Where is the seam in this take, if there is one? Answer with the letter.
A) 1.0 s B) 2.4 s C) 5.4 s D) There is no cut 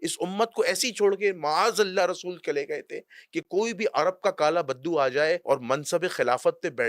C